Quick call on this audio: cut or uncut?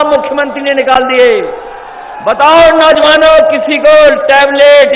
uncut